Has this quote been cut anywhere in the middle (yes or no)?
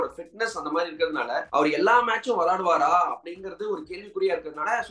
yes